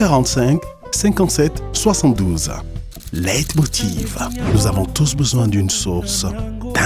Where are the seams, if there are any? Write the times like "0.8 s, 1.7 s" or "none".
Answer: none